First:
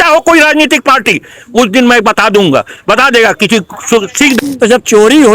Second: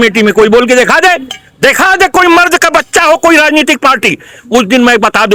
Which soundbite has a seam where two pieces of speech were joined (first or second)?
first